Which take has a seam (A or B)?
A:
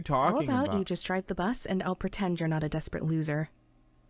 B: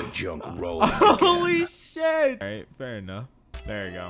B